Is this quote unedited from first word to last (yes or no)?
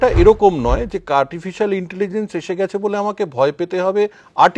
yes